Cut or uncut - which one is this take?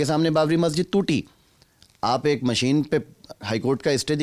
uncut